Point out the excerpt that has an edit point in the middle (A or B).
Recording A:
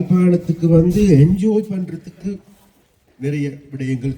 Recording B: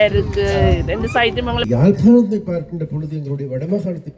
B